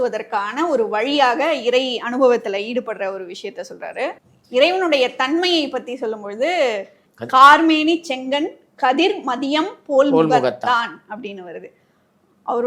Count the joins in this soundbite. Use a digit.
1